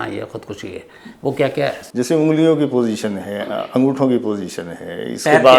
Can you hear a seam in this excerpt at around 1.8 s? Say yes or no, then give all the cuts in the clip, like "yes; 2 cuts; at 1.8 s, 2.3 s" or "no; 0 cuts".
yes; 1 cut; at 1.8 s